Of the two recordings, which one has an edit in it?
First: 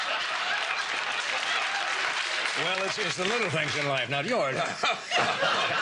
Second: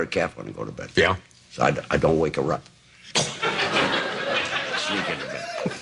first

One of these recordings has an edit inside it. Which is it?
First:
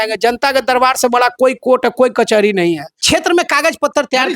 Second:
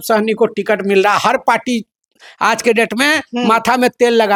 first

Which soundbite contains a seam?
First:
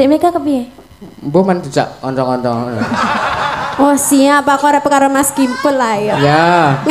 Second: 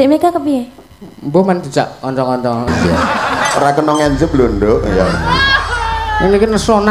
second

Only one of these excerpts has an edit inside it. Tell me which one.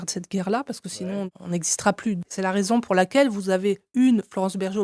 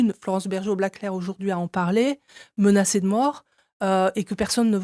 first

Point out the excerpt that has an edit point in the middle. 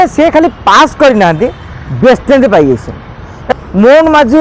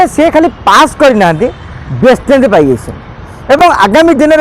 first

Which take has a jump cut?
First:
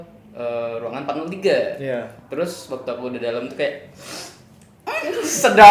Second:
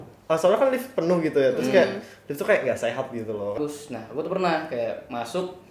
second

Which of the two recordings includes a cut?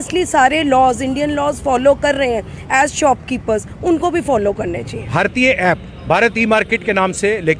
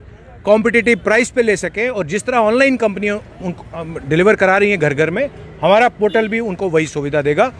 first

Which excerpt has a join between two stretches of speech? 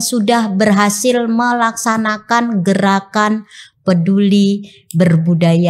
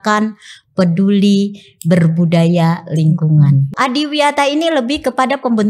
second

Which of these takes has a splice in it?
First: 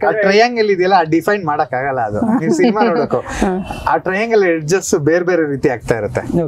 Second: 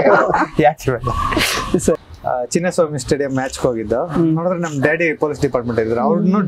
second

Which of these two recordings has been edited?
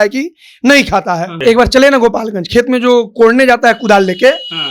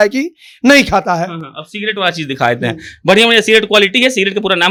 first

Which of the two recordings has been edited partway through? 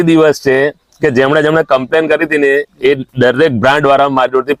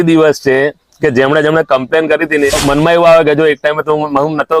second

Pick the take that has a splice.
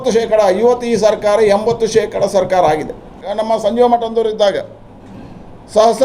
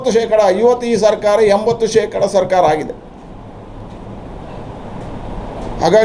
first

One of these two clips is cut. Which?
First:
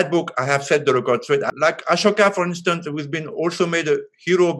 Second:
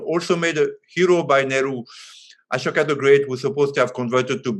first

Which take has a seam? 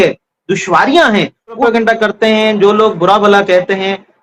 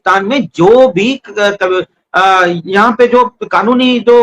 first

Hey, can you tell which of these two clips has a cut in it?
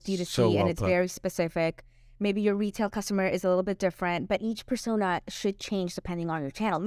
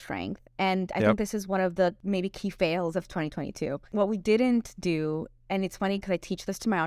second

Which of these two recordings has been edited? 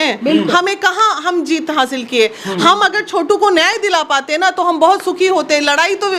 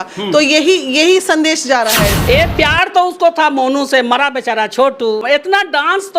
second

